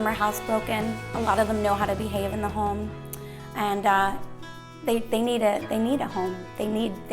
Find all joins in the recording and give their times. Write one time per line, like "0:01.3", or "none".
none